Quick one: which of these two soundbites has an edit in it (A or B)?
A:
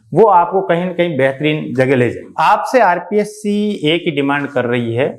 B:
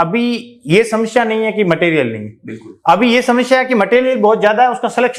A